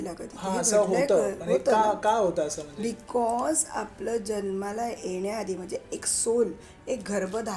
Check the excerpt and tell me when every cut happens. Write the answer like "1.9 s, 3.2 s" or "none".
none